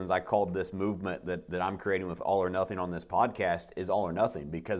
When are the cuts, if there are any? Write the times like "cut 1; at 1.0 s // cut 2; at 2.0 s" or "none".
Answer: none